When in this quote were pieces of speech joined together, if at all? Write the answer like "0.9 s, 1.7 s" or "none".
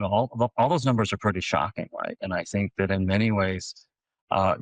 none